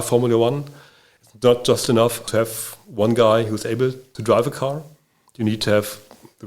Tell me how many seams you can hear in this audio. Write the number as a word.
two